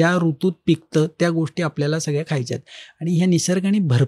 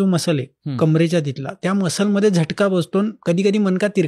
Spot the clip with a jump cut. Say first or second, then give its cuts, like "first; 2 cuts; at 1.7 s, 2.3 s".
second; 2 cuts; at 1.6 s, 3.2 s